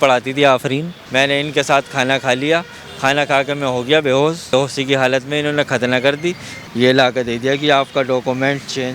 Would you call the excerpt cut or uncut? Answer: cut